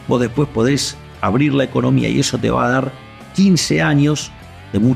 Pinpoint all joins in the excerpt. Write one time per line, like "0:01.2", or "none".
none